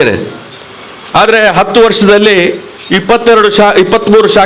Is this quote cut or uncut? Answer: uncut